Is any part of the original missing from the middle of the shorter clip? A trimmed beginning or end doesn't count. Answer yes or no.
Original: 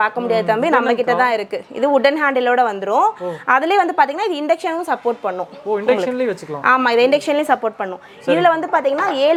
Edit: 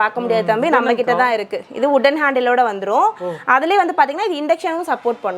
no